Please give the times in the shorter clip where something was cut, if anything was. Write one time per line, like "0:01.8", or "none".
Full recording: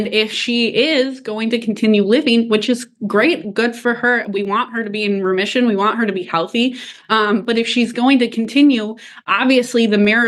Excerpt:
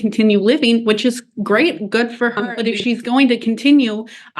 0:02.4